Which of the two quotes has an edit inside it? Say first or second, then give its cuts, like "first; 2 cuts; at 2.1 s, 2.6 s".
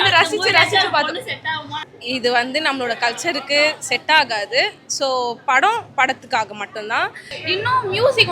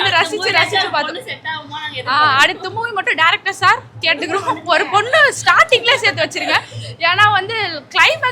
first; 2 cuts; at 1.9 s, 7.3 s